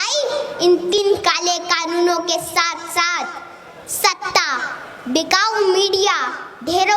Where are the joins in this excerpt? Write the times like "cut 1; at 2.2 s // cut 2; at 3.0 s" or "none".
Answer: cut 1; at 1.0 s

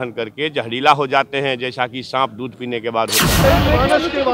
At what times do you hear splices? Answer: cut 1; at 3.4 s

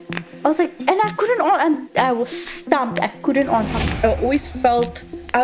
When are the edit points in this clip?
cut 1; at 3.9 s

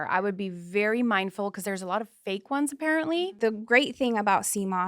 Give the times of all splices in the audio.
cut 1; at 3.4 s

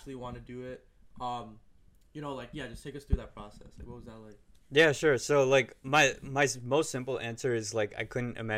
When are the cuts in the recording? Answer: none

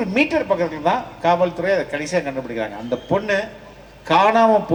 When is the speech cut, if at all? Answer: none

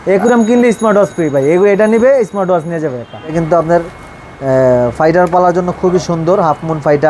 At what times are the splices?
cut 1; at 3.3 s

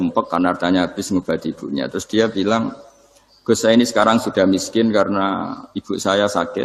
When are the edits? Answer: none

